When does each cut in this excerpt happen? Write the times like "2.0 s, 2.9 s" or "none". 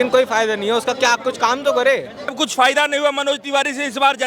2.3 s